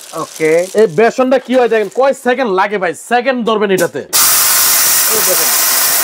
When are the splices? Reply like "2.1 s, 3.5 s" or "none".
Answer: 4.2 s